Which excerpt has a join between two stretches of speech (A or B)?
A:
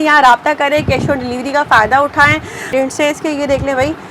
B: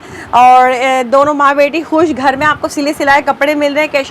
A